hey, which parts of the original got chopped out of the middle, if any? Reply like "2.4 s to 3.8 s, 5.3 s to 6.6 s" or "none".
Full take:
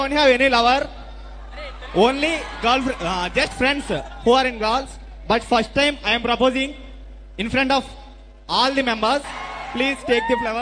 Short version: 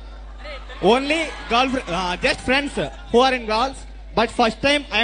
none